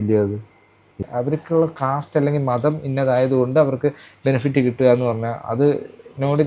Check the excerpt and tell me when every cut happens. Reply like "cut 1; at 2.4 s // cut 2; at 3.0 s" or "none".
cut 1; at 1.1 s

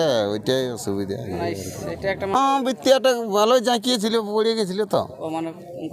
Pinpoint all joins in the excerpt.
cut 1; at 2.3 s

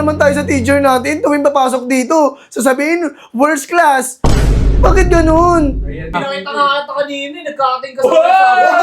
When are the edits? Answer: cut 1; at 6.2 s

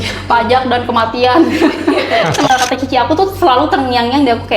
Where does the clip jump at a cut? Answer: cut 1; at 2.5 s

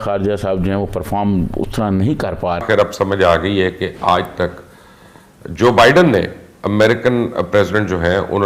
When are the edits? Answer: cut 1; at 2.6 s

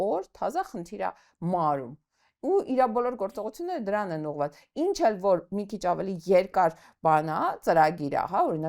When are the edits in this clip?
none

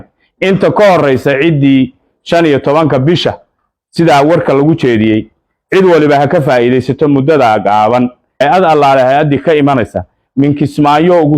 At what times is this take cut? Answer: cut 1; at 8.2 s

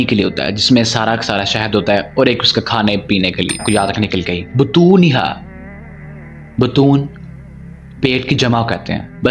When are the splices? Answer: cut 1; at 3.6 s

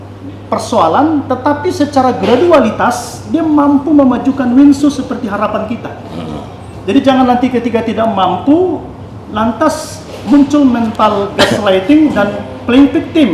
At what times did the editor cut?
none

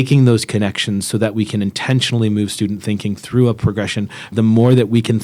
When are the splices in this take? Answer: cut 1; at 4.3 s

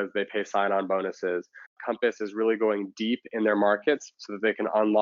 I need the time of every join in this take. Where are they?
cut 1; at 1.8 s

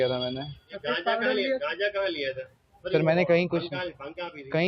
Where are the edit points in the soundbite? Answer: none

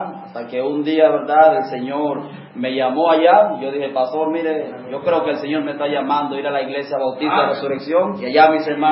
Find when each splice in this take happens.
cut 1; at 3.8 s

